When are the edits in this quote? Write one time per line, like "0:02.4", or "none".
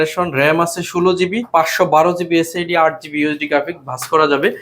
0:01.4